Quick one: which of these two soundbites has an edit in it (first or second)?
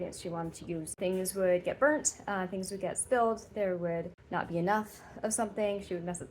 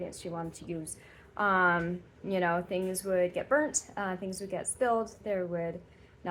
first